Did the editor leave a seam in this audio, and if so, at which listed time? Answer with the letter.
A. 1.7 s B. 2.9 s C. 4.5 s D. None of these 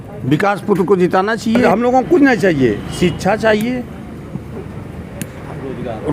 A